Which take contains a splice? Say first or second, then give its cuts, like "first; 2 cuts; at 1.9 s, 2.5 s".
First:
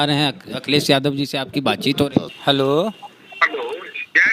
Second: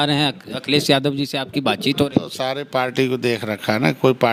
first; 1 cut; at 2.3 s